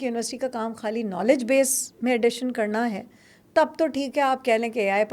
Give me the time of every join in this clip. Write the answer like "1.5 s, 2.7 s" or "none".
none